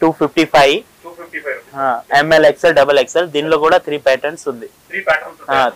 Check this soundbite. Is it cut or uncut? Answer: uncut